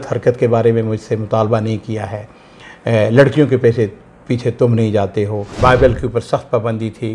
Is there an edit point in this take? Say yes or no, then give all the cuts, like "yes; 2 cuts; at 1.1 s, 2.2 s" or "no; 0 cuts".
yes; 1 cut; at 5.6 s